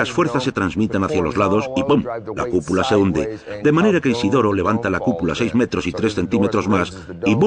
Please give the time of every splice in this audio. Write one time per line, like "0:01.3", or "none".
0:04.1